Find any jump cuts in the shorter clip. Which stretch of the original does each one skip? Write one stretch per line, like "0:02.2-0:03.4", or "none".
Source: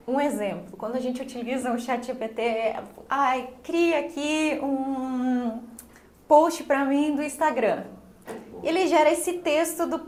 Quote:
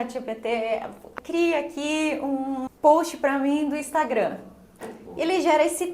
0:03.0-0:03.5
0:05.1-0:06.1